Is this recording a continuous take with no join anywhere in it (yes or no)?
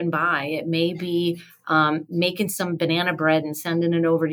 yes